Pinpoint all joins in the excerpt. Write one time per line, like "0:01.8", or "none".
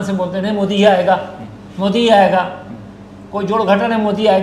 none

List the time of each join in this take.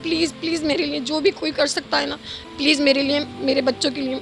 none

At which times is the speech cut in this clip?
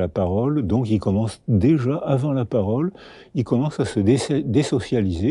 none

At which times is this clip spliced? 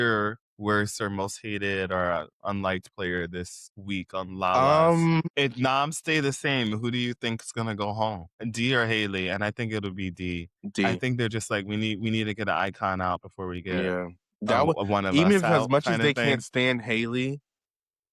0:05.3

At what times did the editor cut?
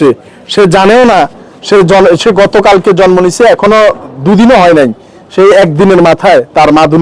none

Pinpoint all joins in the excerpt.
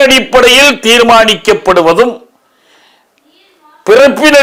none

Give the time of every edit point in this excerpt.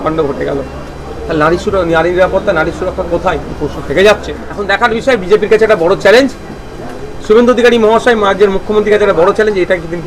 0:04.5

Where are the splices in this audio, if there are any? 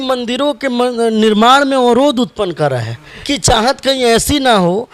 0:03.2

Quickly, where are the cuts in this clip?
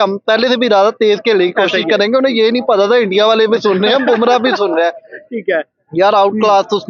none

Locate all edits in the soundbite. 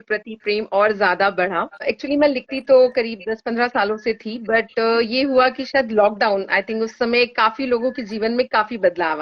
0:01.8

